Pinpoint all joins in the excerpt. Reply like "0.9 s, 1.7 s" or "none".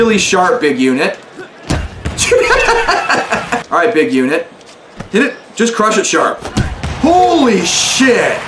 3.6 s